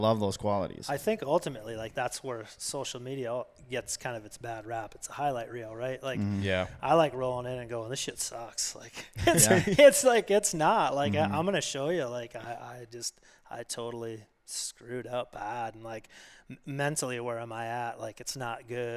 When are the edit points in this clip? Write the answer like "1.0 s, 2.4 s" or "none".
1.9 s